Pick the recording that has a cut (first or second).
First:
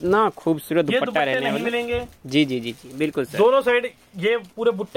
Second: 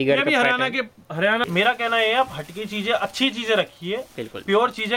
second